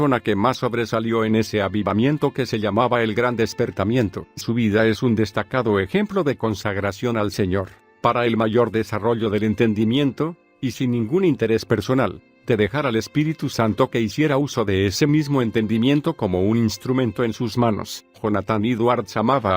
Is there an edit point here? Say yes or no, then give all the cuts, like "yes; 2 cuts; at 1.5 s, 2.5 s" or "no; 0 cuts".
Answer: yes; 1 cut; at 14.2 s